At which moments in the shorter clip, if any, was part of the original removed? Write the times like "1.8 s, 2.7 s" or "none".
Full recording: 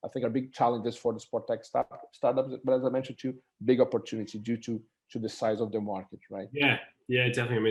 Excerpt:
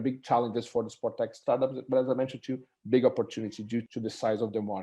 1.4 s, 3.9 s